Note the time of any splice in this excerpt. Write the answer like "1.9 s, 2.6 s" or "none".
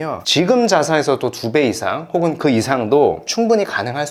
none